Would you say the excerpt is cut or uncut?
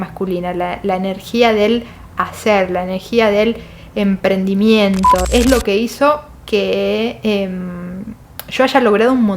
cut